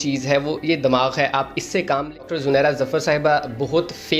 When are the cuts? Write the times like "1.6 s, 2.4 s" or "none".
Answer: 2.2 s